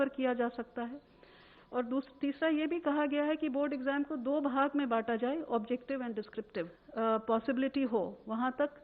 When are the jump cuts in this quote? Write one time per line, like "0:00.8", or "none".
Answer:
0:06.8